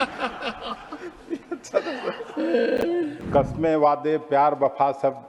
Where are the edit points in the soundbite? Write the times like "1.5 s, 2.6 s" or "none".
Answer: 3.1 s